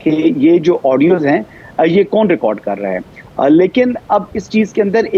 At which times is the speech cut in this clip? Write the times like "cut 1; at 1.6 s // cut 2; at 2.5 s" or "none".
none

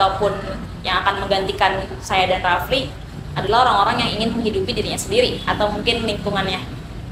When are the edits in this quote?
none

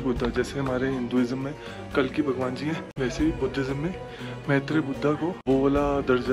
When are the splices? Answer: cut 1; at 2.9 s // cut 2; at 5.4 s

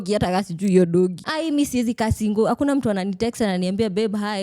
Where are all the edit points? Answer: cut 1; at 1.2 s

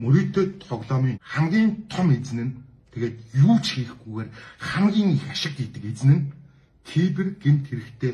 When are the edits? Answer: cut 1; at 1.2 s

